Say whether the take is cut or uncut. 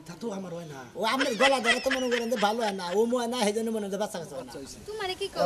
cut